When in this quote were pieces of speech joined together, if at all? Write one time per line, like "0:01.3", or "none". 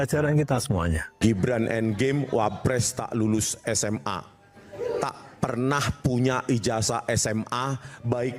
0:01.1